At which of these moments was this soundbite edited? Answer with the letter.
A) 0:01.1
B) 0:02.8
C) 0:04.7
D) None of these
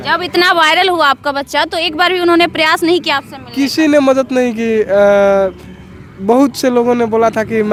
D